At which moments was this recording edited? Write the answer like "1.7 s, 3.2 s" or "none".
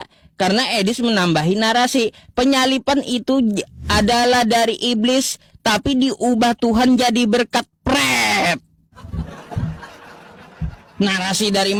none